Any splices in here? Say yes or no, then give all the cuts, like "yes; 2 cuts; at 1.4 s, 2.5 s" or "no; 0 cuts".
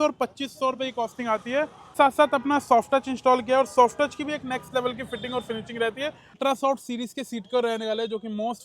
yes; 2 cuts; at 1.9 s, 6.4 s